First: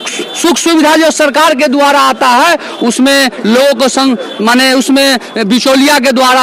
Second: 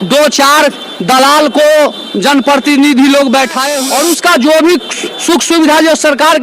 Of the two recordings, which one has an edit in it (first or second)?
second